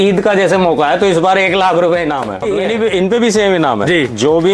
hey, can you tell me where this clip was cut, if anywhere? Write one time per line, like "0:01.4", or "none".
0:02.5